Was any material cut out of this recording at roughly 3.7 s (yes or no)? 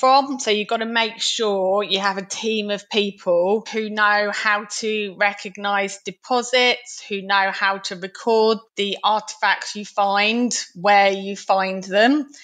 yes